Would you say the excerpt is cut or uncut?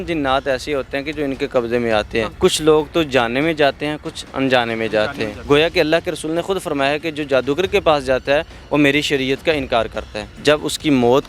cut